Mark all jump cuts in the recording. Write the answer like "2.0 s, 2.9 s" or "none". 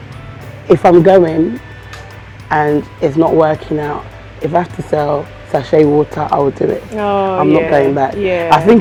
none